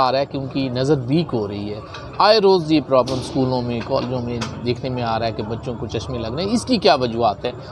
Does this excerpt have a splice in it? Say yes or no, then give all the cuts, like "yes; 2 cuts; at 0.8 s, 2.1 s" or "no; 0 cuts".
no; 0 cuts